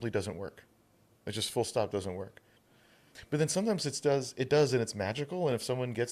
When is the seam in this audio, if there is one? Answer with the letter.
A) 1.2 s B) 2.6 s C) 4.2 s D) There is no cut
B